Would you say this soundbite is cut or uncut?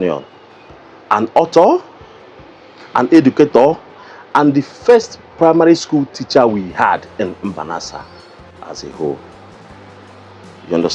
uncut